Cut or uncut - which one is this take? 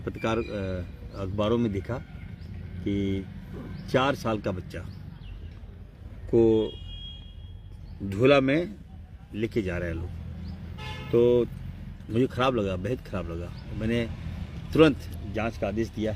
uncut